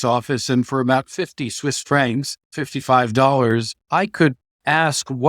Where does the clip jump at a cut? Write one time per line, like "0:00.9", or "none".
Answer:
0:02.6
0:03.8